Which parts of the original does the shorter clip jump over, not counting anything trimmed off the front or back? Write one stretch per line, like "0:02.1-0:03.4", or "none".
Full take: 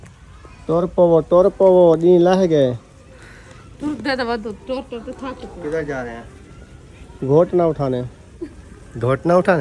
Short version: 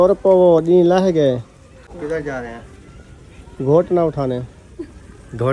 0:03.2-0:05.5